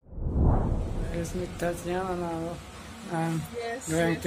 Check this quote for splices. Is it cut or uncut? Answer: cut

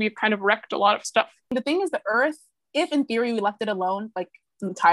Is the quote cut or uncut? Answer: cut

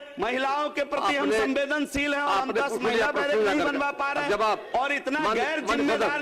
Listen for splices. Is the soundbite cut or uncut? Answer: uncut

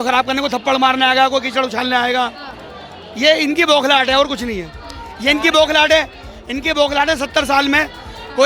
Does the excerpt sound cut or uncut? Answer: uncut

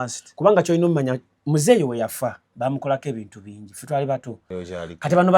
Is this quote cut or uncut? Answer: cut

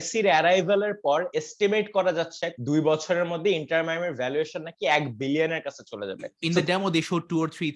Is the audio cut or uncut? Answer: cut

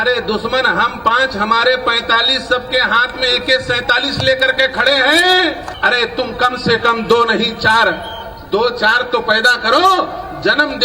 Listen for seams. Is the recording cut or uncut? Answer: uncut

